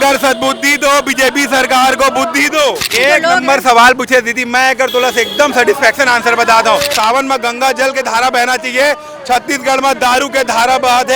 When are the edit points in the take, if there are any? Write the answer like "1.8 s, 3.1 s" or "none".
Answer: 2.9 s, 6.9 s